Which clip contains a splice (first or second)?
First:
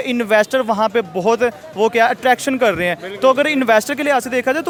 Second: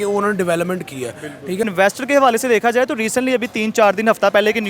second